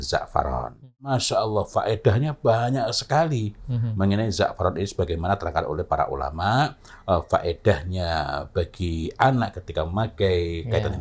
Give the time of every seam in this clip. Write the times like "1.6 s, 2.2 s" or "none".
1.1 s